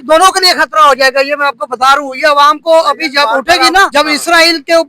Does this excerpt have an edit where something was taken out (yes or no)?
yes